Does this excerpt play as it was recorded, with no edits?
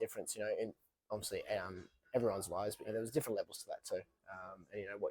no; 1 cut; at 2.9 s

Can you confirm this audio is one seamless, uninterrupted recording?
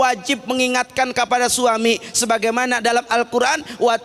yes; 0 cuts

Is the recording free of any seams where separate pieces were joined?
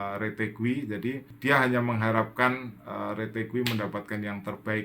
no; 1 cut; at 1.3 s

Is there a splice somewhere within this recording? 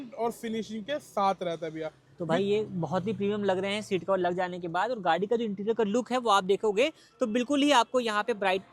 no; 0 cuts

